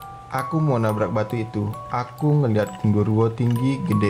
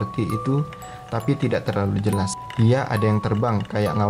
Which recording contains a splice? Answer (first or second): second